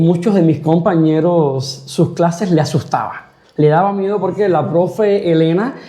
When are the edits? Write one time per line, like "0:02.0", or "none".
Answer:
none